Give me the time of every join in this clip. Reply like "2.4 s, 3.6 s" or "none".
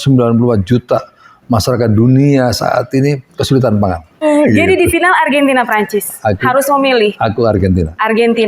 4.2 s